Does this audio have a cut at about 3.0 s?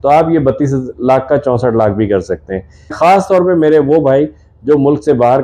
yes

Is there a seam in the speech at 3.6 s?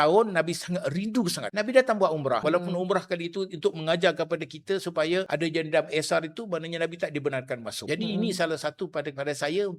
no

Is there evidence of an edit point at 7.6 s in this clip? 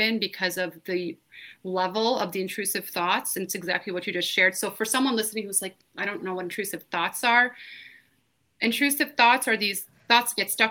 no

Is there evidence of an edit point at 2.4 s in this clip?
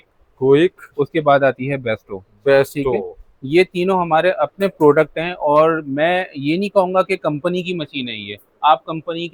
no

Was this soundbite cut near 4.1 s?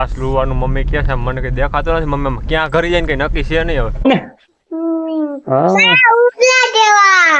yes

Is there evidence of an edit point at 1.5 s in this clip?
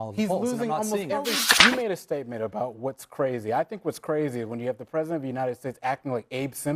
yes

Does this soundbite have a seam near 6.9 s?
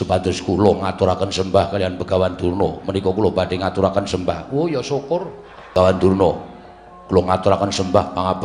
no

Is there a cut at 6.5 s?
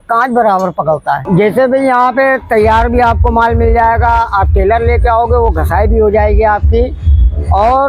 no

